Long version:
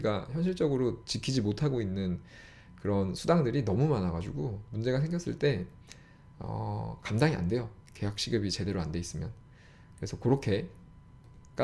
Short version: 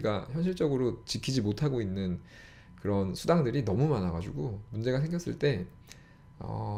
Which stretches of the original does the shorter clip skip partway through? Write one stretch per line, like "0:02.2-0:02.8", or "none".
none